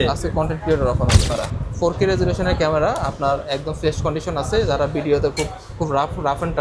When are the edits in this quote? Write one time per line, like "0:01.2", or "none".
0:01.3